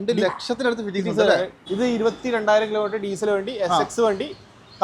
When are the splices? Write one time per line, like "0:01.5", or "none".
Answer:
0:01.6